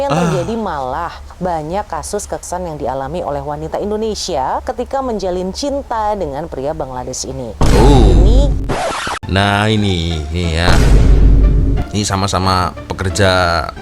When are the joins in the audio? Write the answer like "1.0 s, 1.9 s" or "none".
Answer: 2.4 s, 8.6 s